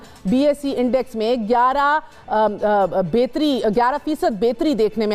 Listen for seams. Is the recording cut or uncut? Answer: uncut